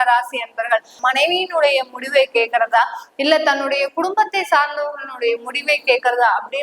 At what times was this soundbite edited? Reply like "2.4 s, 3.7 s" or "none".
0.9 s